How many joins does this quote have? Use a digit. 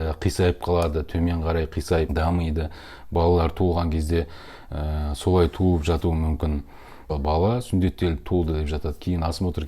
2